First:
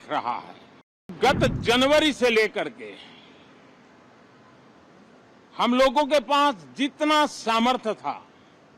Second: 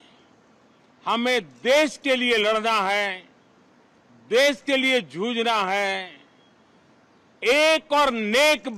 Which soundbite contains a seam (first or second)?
first